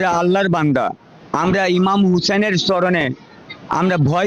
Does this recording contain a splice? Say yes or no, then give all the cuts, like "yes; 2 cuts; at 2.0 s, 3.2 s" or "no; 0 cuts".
no; 0 cuts